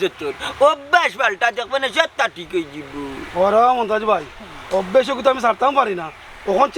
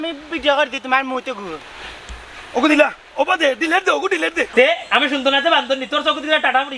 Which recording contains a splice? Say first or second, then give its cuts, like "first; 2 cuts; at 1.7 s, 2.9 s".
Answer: second; 1 cut; at 4.5 s